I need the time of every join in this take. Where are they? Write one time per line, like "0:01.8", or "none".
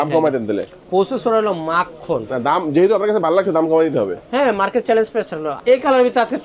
0:05.5